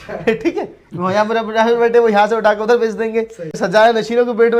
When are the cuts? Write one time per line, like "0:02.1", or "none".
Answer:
0:03.6

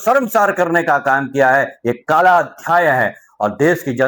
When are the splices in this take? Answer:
none

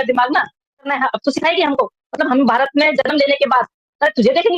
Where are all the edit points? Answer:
0:00.9

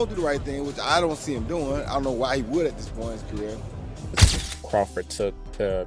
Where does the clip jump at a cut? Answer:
0:04.3

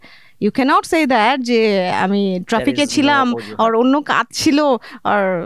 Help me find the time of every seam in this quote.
none

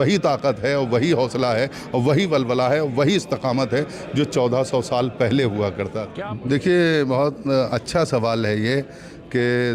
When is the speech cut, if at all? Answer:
0:06.0

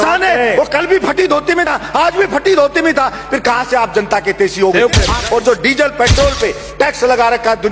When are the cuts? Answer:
0:05.1

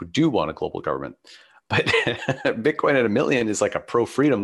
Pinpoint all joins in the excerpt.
0:01.7

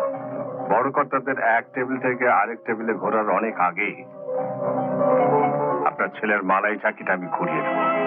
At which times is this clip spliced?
none

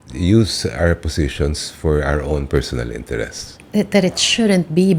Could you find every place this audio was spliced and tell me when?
none

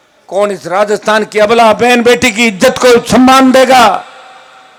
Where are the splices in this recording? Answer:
none

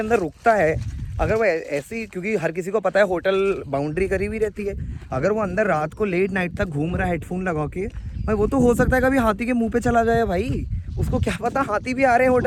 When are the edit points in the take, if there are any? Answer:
none

